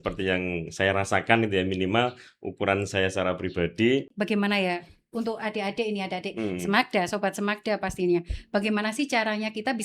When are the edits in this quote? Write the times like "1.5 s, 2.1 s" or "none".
4.1 s